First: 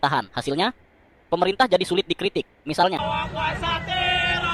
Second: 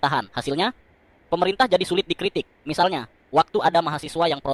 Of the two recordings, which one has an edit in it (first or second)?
first